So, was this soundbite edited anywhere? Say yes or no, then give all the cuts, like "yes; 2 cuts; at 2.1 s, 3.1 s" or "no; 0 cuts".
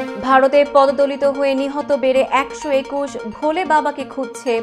no; 0 cuts